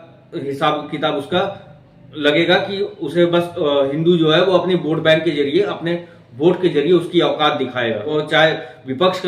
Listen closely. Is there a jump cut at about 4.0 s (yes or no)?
no